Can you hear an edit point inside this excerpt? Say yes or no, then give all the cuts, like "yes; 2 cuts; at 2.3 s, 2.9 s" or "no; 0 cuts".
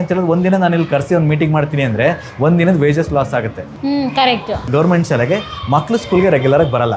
yes; 1 cut; at 4.6 s